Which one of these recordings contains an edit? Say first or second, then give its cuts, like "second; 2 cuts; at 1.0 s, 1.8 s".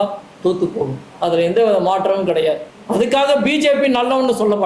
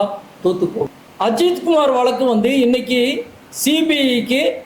second; 1 cut; at 1.0 s